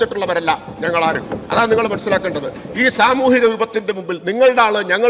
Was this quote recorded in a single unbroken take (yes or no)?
yes